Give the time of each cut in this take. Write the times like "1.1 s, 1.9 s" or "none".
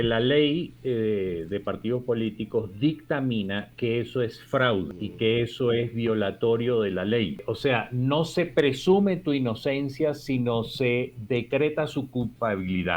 5.0 s, 7.5 s

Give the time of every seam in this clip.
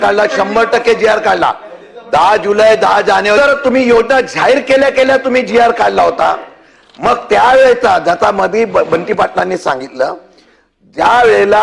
3.4 s

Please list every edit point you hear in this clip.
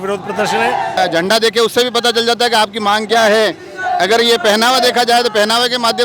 1.0 s

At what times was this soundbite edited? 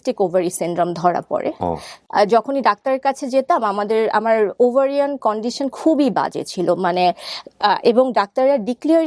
1.9 s

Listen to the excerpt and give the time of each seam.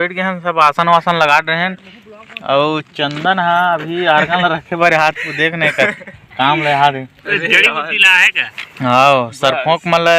none

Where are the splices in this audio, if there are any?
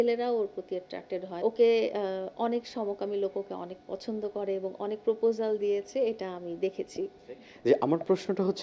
1.3 s, 7.5 s

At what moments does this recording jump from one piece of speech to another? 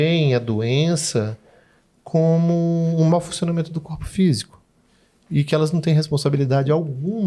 none

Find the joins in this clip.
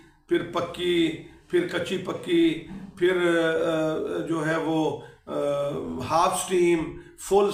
none

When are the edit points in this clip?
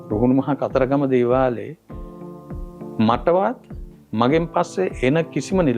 none

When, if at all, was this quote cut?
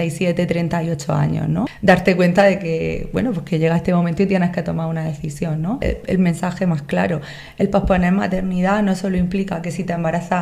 1.7 s, 5.8 s

